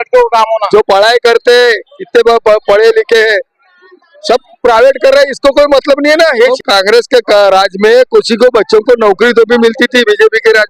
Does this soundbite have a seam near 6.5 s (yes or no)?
yes